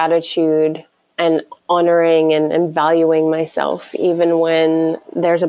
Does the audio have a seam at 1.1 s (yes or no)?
yes